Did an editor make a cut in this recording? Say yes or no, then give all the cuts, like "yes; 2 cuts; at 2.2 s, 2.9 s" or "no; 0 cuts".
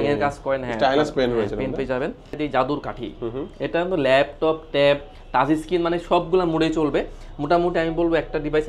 yes; 1 cut; at 2.3 s